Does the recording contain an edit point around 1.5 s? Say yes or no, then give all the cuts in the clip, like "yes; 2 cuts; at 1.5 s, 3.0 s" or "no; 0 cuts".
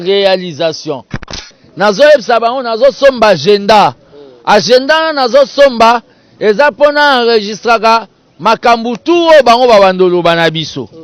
yes; 1 cut; at 1.5 s